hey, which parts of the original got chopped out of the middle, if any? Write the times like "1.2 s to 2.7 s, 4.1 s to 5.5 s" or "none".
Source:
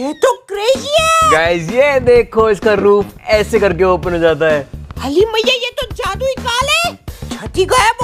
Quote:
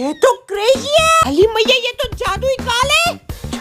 1.2 s to 4.9 s